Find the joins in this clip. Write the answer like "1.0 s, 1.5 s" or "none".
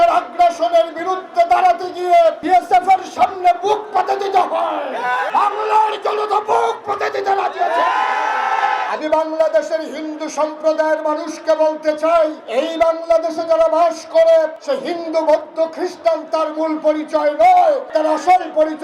2.4 s, 5.3 s, 8.8 s, 12.4 s, 14.6 s, 17.9 s